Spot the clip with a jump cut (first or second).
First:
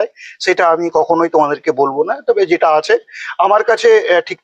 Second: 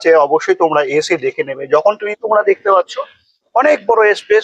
second